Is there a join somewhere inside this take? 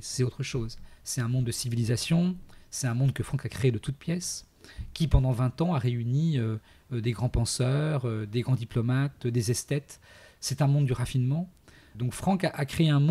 yes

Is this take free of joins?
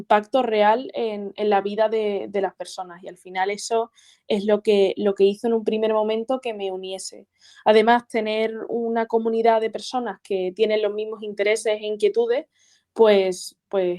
yes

